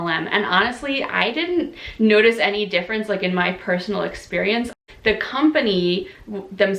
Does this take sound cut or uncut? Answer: cut